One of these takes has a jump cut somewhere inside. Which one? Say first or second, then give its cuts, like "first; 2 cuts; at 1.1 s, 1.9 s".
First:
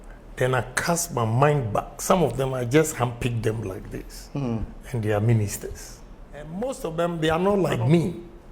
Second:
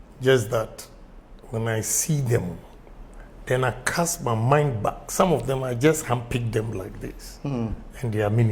first; 1 cut; at 6.5 s